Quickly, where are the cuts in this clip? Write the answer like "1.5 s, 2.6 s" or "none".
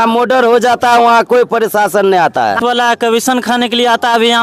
2.6 s